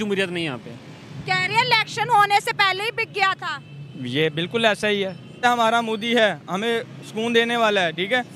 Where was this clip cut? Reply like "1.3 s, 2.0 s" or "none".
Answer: 5.4 s